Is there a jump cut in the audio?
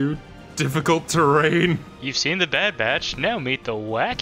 yes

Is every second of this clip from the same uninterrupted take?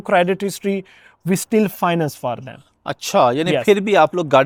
yes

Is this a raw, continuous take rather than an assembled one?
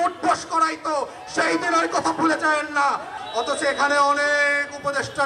no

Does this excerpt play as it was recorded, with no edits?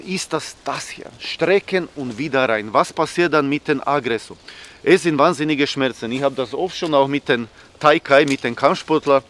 yes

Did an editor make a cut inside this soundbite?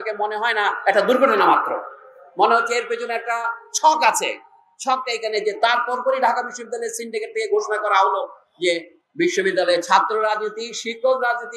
no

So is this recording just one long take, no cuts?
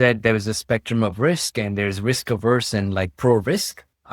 yes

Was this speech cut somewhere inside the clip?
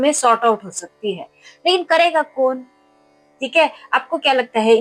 no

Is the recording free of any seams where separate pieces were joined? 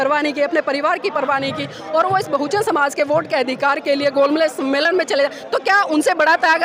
yes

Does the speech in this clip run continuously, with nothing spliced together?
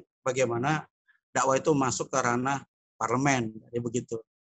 yes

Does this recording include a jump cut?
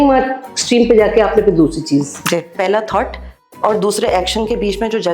yes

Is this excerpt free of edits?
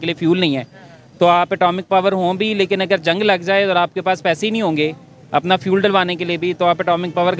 yes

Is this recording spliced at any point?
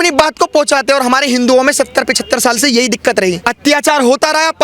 yes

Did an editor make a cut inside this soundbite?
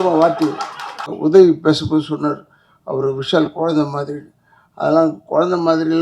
yes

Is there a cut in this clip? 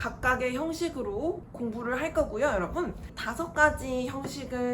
yes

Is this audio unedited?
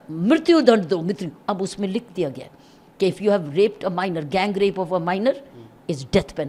yes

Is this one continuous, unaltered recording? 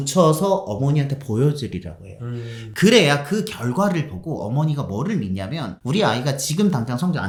yes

